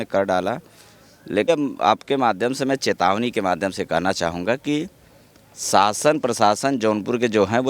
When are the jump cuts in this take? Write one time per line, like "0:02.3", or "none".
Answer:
0:01.5